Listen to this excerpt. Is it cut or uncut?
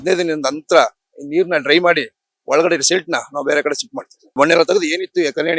cut